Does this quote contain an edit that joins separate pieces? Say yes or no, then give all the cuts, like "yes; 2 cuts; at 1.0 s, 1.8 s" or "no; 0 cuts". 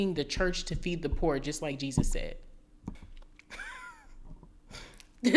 yes; 1 cut; at 2.9 s